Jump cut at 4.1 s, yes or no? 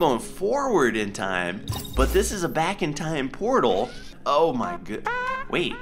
yes